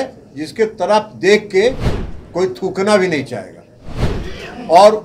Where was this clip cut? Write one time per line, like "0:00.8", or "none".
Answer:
0:04.1